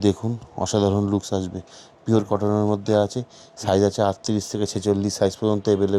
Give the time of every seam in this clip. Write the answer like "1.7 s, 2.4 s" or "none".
none